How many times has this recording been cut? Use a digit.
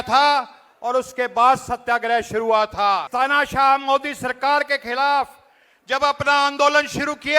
1